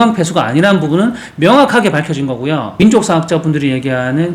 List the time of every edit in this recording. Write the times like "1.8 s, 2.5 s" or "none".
2.8 s